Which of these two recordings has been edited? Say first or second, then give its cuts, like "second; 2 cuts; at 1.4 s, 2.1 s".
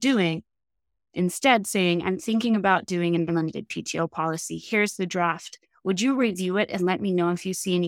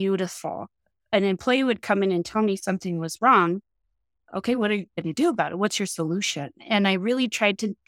second; 1 cut; at 1.1 s